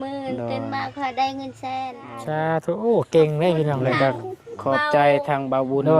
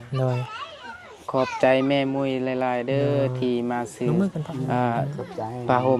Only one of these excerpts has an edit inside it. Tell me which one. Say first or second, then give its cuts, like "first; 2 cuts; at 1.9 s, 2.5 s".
first; 1 cut; at 2.2 s